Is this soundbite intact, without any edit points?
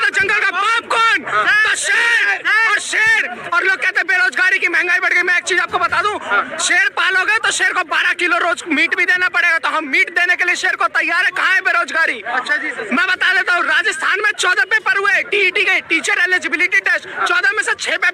yes; 0 cuts

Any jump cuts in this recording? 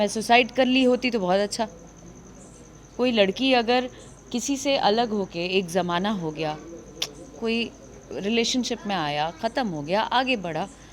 no; 0 cuts

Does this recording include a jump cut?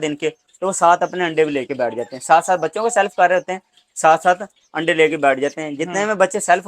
no; 0 cuts

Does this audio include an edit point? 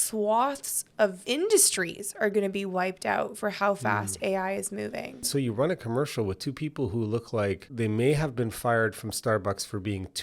yes; 2 cuts; at 1.2 s, 5.3 s

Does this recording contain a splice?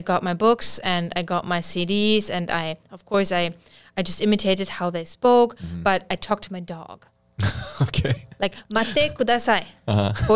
no; 0 cuts

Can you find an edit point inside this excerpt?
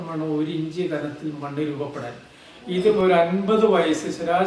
yes; 1 cut; at 3.0 s

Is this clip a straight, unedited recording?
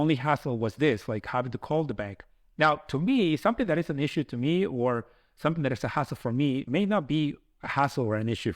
no; 1 cut; at 6.6 s

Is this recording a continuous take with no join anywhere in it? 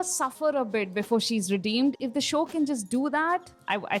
yes; 0 cuts

